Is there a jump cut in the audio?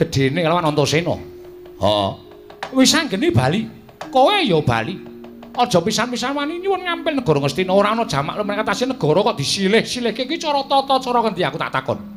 yes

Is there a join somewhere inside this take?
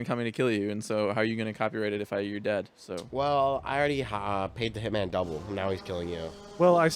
no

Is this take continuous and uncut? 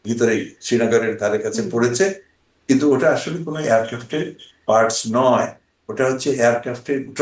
yes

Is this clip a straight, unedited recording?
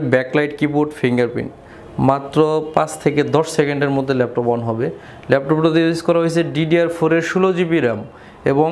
yes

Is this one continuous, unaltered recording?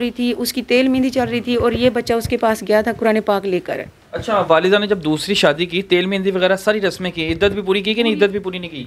yes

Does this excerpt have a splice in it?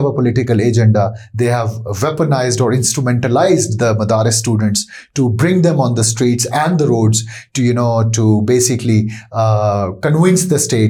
no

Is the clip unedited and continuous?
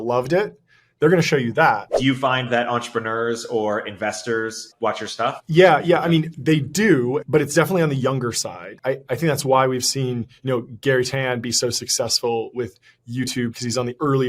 no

